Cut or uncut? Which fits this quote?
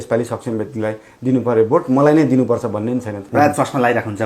cut